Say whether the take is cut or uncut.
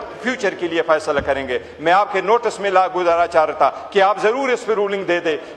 uncut